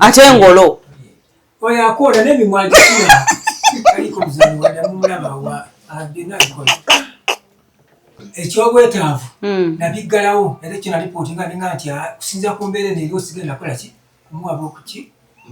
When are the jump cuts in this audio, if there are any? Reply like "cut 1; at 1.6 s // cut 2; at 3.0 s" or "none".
cut 1; at 8.1 s